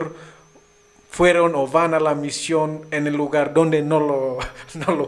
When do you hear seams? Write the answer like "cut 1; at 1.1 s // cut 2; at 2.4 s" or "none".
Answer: none